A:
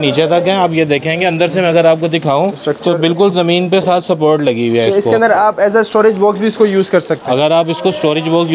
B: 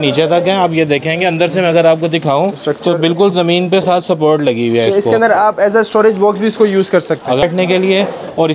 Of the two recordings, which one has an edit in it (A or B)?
B